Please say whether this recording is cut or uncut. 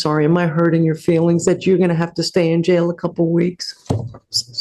uncut